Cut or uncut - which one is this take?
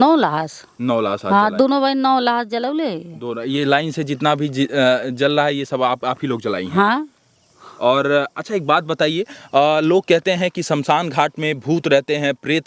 uncut